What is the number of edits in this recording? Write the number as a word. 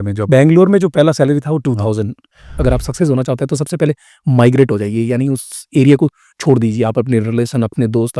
one